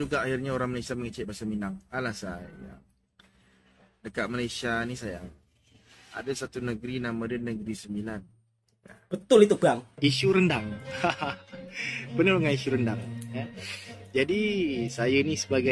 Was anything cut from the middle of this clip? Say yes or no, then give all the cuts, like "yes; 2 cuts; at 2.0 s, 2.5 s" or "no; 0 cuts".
yes; 1 cut; at 9.9 s